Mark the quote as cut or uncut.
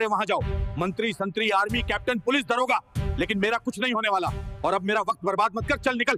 uncut